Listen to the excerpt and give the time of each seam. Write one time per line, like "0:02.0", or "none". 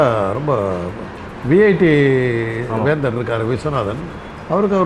none